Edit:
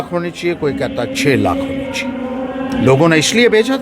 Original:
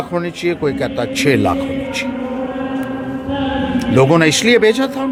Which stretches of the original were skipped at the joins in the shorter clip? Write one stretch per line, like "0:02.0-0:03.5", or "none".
0:02.7-0:03.8